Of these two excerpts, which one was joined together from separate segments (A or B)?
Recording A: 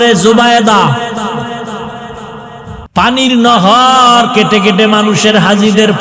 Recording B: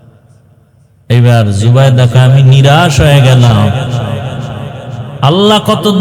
A